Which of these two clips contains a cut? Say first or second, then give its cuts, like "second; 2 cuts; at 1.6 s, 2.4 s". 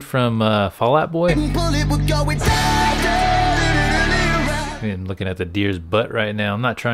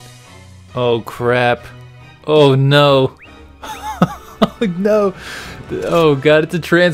first; 2 cuts; at 1.3 s, 4.6 s